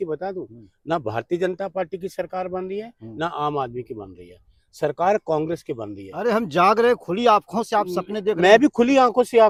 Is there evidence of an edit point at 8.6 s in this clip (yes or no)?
no